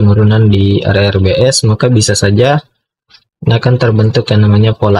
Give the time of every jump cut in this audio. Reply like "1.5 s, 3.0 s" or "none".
none